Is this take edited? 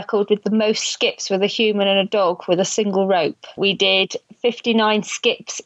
yes; 1 cut; at 3.6 s

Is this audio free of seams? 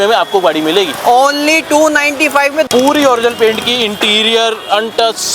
no; 1 cut; at 2.7 s

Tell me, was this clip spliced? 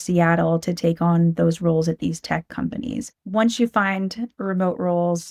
yes; 1 cut; at 3.1 s

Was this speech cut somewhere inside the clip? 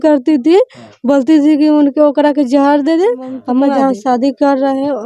yes; 1 cut; at 3.7 s

